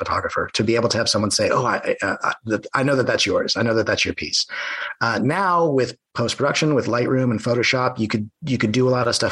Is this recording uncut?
yes; 0 cuts

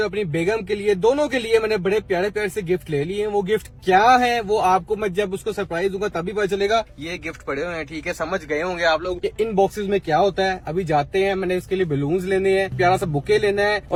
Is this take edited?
no; 0 cuts

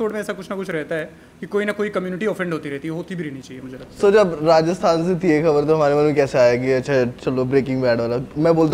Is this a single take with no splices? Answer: yes; 0 cuts

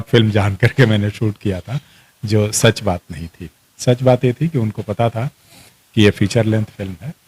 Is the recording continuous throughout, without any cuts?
yes; 0 cuts

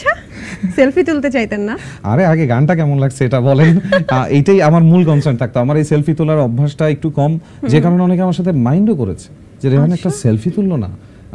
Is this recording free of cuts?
yes; 0 cuts

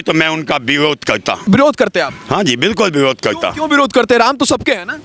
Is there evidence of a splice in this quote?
no; 0 cuts

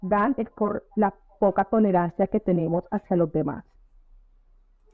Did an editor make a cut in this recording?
no; 0 cuts

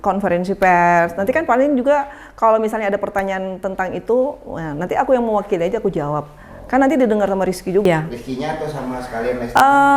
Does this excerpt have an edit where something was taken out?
yes; 1 cut; at 7.9 s

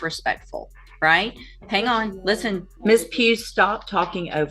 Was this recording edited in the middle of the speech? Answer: yes; 1 cut; at 2.7 s

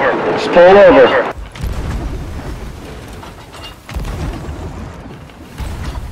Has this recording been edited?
no; 0 cuts

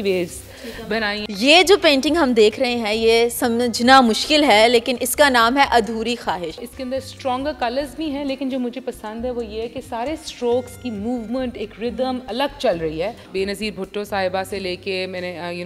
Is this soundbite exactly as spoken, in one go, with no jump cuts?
no; 3 cuts; at 1.2 s, 6.6 s, 13.2 s

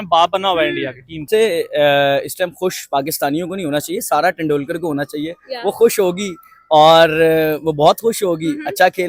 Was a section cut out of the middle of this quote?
yes; 1 cut; at 1.3 s

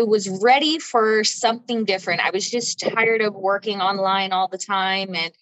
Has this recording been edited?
no; 0 cuts

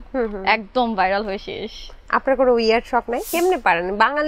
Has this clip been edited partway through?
yes; 1 cut; at 3.2 s

